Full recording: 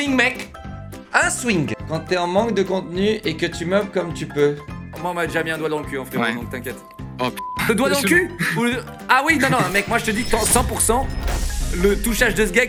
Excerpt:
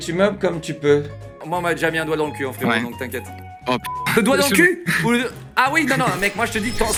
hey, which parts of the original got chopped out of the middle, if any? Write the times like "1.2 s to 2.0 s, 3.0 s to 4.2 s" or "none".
none

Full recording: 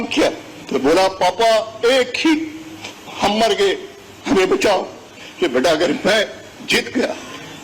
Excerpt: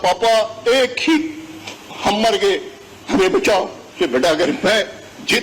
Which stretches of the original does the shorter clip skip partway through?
5.0 s to 5.2 s

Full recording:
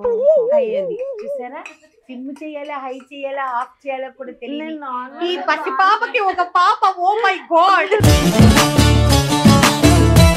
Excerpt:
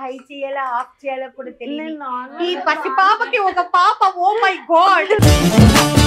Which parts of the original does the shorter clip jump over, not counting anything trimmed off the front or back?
none

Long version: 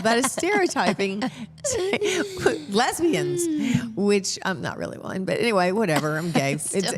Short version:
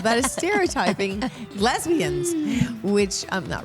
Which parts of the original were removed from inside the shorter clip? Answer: 1.5 s to 2.6 s

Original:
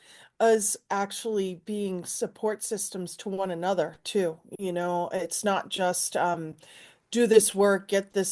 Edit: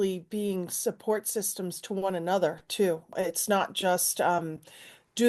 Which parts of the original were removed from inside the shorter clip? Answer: 4.5 s to 5.1 s

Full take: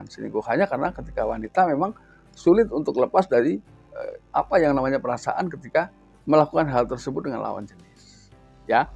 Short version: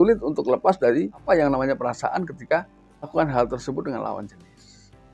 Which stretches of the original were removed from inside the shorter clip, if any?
3.7 s to 4.5 s, 6.3 s to 6.4 s

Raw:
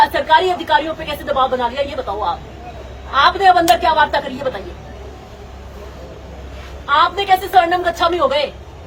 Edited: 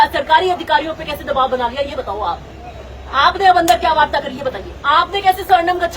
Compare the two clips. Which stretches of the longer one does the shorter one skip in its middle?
4.7 s to 6.7 s

